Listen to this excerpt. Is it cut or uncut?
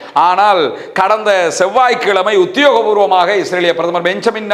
uncut